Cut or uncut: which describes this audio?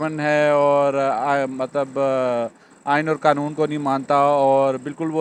uncut